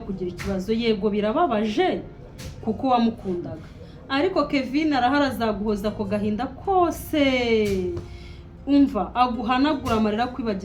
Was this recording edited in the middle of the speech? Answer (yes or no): no